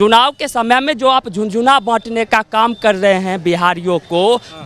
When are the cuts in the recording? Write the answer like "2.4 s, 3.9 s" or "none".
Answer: none